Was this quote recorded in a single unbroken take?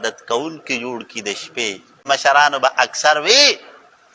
no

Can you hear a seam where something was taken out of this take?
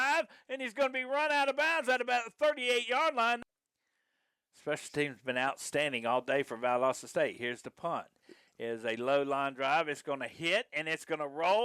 yes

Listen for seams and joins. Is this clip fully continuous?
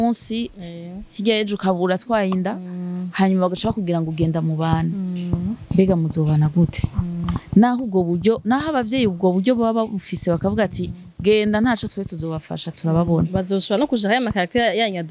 yes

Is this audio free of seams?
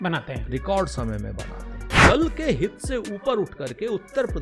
no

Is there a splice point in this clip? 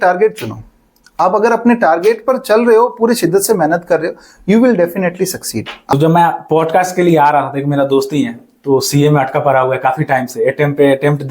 yes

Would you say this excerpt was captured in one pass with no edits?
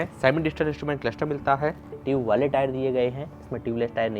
no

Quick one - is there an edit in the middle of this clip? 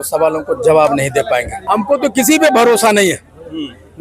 yes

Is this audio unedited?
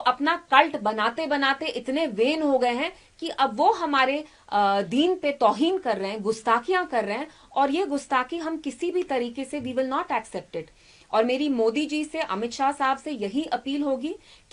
yes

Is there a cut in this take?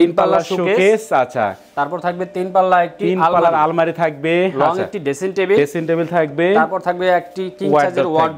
no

